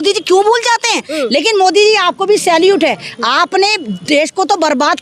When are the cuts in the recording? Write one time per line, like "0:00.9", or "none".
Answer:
none